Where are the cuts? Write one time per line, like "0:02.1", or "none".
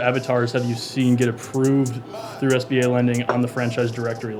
none

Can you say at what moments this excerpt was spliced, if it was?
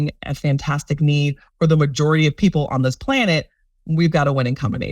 none

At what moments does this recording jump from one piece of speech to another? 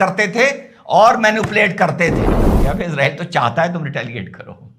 0:02.3

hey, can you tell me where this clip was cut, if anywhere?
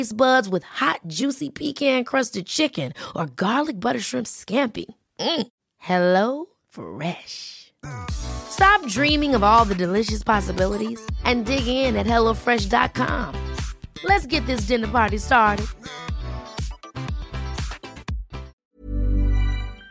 0:18.6

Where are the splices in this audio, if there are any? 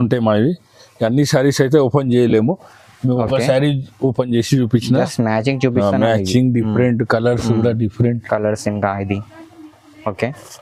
none

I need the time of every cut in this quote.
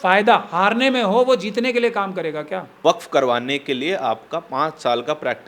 0:02.8

